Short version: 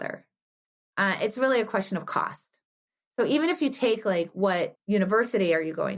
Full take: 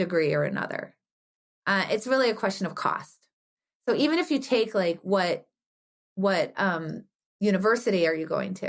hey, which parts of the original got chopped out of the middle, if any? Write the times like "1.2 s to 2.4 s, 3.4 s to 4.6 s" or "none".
5.5 s to 7.3 s